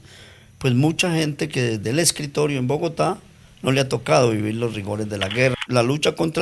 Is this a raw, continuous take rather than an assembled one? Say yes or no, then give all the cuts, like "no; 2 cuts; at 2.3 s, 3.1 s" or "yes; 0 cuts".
no; 1 cut; at 5.5 s